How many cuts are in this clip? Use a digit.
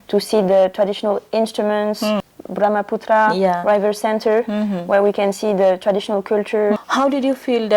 2